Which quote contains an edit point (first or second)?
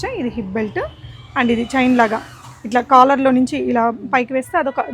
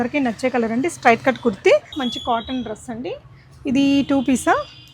second